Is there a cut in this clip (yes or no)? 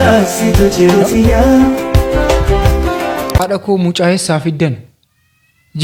no